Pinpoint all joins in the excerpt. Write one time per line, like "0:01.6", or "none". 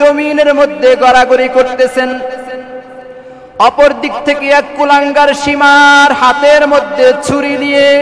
none